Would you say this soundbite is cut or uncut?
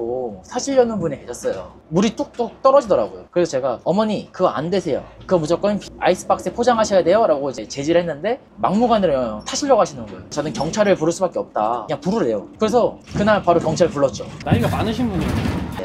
cut